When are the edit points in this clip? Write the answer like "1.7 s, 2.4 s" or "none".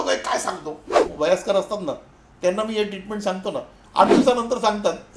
1.1 s

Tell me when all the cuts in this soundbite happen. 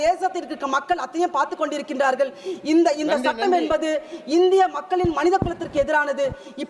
none

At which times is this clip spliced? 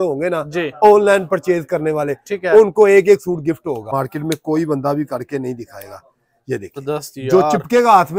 3.9 s, 6.8 s

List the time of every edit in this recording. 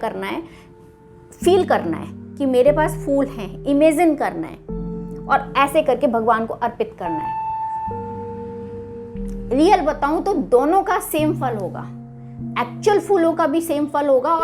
7.1 s, 9.4 s

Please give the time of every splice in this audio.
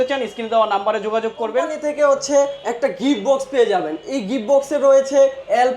1.7 s

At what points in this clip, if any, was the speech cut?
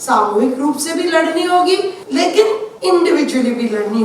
2.4 s

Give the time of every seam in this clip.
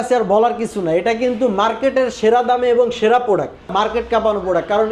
3.7 s

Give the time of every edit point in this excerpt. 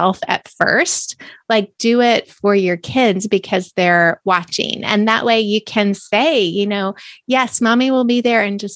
none

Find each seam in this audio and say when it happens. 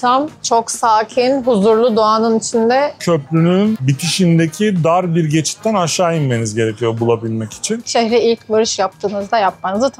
3.0 s, 7.8 s

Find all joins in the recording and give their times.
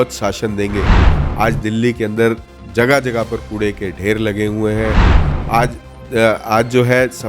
1.1 s

